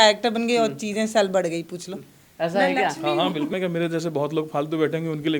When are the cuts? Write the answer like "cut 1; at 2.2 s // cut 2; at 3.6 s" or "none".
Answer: cut 1; at 3.5 s